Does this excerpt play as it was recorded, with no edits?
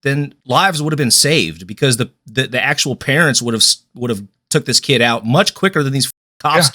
yes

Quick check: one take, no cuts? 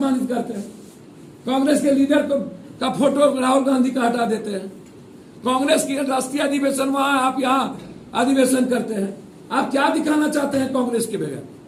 yes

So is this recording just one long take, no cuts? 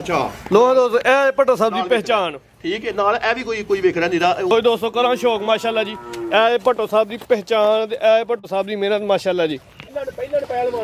no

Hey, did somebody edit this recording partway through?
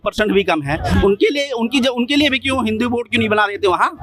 no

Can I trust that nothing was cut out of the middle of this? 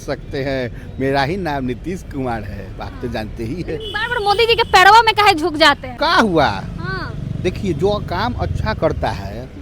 no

